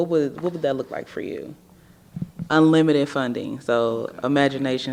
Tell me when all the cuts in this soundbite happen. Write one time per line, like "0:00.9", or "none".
none